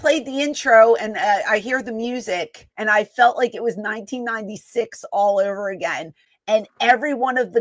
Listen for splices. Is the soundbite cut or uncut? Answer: cut